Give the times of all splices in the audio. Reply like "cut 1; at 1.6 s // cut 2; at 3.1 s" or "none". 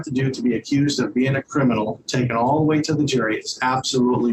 none